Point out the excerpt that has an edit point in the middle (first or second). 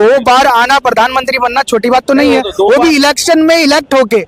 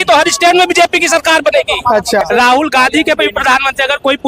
second